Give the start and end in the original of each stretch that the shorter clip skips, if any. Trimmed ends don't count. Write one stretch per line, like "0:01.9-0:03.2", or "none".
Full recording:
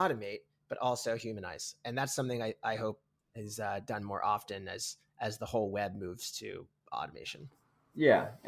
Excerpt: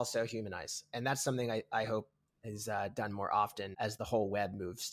0:04.5-0:05.0